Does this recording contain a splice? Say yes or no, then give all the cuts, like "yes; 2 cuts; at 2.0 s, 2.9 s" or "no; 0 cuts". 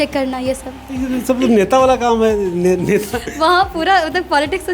no; 0 cuts